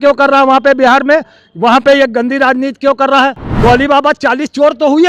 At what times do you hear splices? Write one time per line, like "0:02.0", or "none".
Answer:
0:03.4

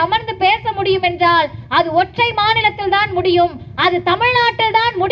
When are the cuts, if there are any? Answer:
none

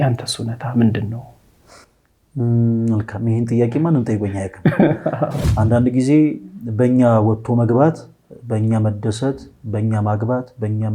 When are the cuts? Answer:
0:05.4

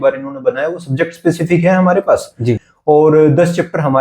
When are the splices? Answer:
0:02.7

